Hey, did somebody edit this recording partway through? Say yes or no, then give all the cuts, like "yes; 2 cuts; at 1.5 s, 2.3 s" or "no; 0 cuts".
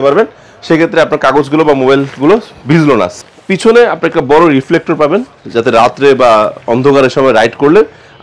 yes; 1 cut; at 3.1 s